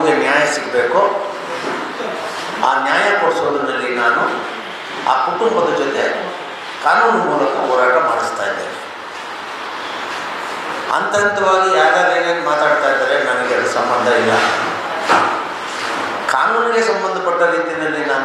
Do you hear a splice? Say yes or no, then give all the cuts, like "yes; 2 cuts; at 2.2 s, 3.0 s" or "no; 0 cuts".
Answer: no; 0 cuts